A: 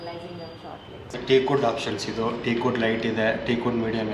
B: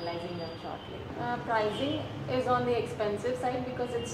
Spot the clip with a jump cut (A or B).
A